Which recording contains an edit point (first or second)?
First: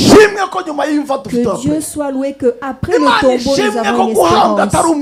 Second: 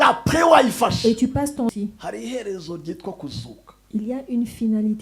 second